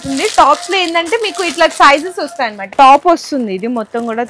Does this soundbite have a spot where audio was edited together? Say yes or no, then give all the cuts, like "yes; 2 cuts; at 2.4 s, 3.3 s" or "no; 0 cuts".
yes; 1 cut; at 2.6 s